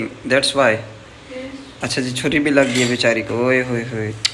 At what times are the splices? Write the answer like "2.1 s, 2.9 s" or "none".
none